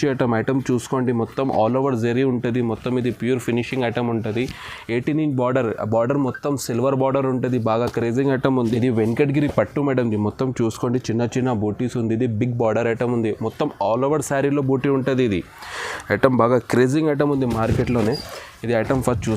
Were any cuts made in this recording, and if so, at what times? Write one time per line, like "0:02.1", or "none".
0:08.7